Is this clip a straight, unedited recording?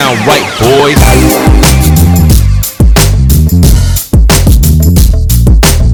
yes; 0 cuts

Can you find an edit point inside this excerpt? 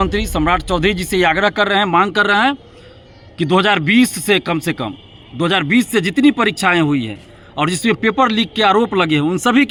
no; 0 cuts

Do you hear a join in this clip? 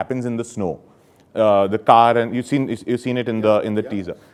no; 0 cuts

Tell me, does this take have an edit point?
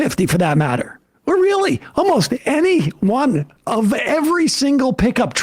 yes; 1 cut; at 3.5 s

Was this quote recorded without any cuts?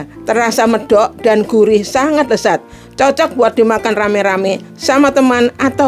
yes; 0 cuts

